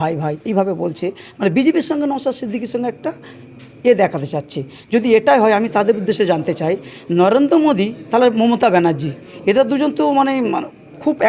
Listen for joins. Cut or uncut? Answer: uncut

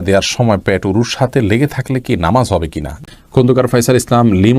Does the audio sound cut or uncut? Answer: cut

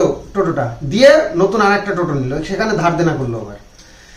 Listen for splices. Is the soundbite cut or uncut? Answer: uncut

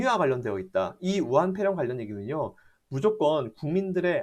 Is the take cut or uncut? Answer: uncut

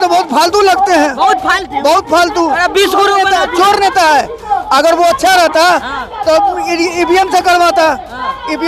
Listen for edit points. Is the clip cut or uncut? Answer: uncut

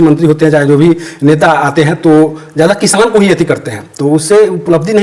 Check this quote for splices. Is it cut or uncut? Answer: uncut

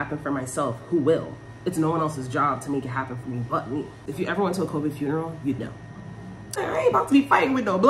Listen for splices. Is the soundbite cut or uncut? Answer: cut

